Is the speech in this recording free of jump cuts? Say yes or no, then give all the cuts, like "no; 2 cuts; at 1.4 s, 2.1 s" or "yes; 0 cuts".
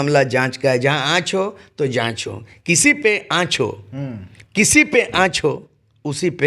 yes; 0 cuts